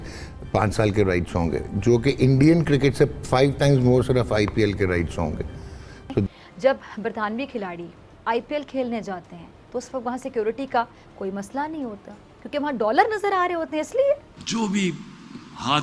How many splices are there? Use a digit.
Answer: 2